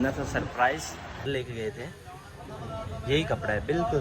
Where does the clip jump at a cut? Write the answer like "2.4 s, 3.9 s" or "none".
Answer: 1.3 s